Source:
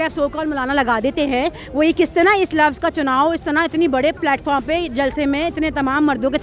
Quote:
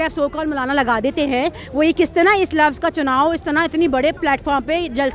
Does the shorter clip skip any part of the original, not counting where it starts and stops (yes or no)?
no